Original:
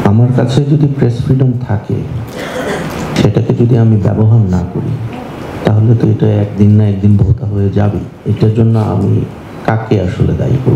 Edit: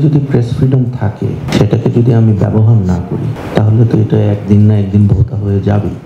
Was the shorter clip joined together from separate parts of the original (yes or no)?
yes